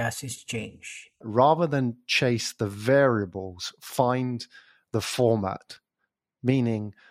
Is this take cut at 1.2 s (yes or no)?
yes